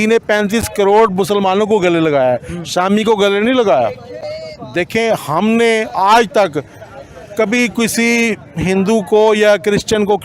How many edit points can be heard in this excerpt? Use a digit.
1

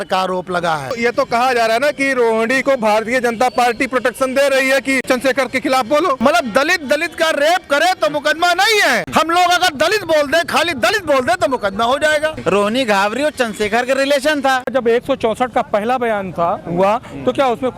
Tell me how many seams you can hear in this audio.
6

